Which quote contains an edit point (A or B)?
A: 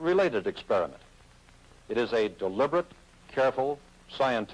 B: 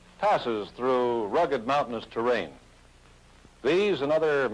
A